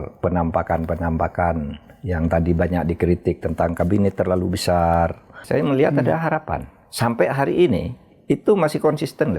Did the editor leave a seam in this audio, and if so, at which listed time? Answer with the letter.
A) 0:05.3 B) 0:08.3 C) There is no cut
A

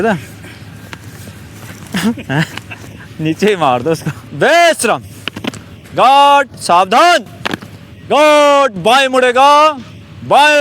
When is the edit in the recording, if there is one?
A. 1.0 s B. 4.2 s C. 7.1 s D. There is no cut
B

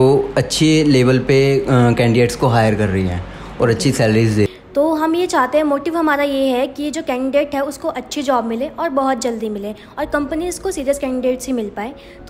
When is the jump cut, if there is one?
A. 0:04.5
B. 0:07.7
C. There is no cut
A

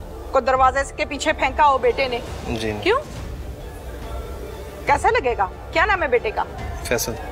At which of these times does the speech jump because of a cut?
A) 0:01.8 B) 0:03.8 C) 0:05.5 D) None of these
D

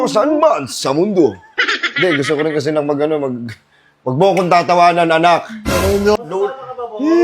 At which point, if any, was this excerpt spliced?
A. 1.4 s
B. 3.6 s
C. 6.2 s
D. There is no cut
C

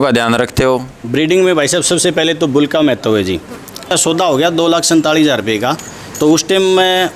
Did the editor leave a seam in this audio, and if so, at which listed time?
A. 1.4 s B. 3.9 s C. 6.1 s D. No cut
B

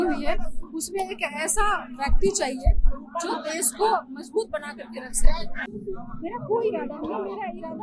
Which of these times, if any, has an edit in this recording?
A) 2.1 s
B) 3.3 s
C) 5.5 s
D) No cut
C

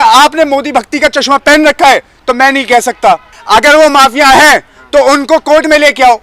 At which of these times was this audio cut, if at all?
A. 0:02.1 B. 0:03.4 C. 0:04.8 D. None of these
B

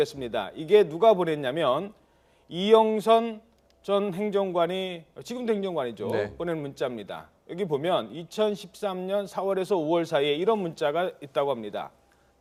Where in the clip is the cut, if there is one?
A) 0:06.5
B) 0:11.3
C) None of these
C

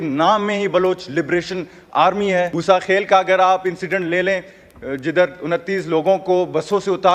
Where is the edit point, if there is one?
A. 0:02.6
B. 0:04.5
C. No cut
A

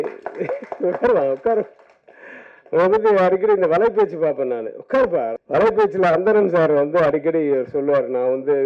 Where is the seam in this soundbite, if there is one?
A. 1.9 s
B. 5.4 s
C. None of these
B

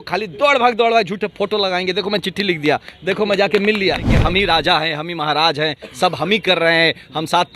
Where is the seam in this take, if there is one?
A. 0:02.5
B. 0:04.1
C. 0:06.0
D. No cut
B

